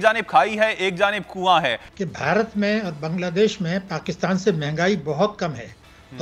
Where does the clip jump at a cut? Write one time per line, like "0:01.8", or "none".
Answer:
0:01.9